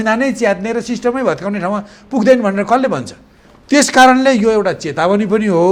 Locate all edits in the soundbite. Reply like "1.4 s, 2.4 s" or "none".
none